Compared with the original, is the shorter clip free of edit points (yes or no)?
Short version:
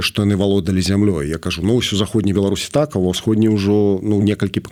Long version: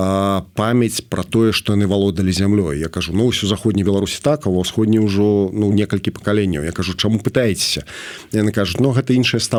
yes